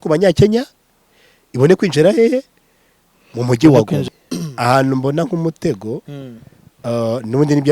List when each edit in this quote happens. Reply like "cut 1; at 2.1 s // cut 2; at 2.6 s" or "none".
cut 1; at 4.1 s